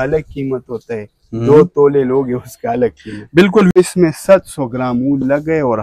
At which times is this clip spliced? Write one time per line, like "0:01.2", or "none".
0:03.7